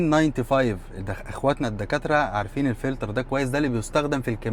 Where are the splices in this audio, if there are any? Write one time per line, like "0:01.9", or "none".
none